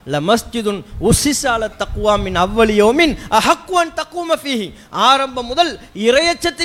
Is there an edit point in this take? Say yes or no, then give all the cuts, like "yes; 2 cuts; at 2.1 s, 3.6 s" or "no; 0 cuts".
no; 0 cuts